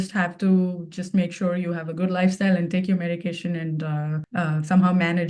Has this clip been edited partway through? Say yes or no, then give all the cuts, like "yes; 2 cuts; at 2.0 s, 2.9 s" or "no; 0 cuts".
yes; 1 cut; at 4.2 s